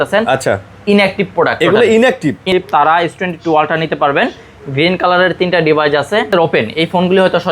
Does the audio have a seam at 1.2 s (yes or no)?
no